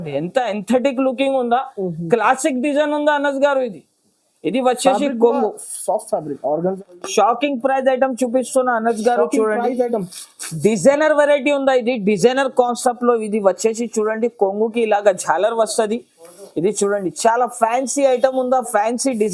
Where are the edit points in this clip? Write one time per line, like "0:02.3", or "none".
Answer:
0:06.8